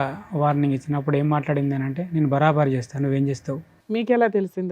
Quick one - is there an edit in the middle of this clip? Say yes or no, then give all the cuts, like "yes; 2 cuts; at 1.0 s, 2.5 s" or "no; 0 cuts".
yes; 1 cut; at 3.7 s